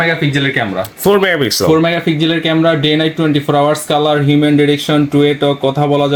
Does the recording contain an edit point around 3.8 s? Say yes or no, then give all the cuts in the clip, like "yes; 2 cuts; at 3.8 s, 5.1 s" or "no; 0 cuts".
no; 0 cuts